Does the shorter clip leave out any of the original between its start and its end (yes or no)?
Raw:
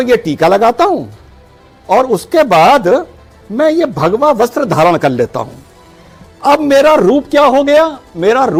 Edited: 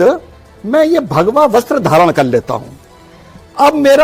no